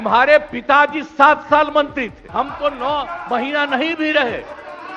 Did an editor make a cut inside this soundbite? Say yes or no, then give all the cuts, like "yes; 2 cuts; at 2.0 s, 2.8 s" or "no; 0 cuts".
yes; 1 cut; at 2.2 s